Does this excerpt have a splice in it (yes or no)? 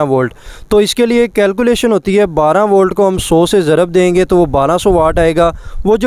no